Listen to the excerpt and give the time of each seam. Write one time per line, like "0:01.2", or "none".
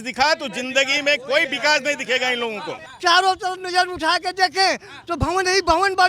0:02.9

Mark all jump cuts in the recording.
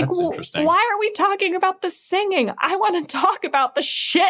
none

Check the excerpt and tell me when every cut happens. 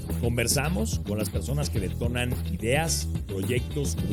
none

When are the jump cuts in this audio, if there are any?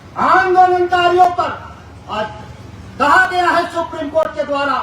none

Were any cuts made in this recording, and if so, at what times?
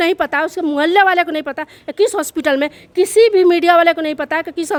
none

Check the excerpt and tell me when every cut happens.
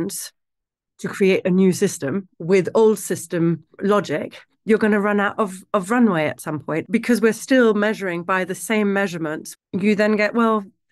0:02.2
0:06.8
0:09.4

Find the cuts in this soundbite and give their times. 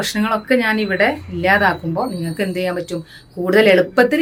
none

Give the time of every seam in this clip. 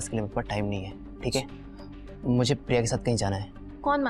none

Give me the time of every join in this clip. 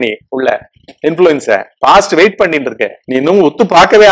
0:02.9

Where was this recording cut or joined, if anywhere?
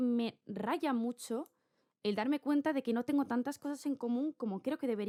none

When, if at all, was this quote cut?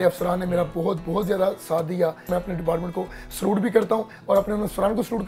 0:02.3

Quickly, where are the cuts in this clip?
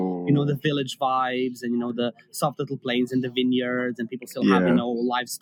none

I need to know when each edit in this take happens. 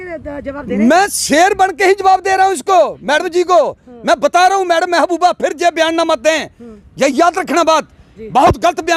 none

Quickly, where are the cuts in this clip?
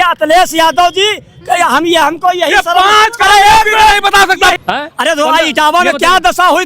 0:04.6

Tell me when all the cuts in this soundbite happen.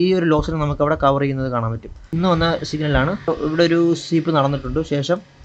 0:02.2
0:03.3

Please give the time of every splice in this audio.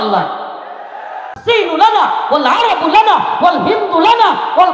0:01.4

